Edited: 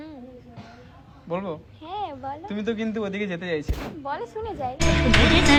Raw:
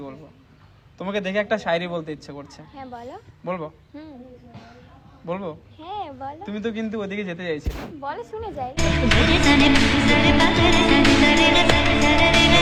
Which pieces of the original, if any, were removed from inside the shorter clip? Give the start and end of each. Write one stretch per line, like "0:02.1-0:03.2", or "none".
none